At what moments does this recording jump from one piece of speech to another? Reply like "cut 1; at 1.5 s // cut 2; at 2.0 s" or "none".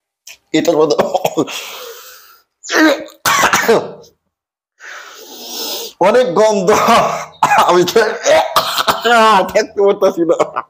none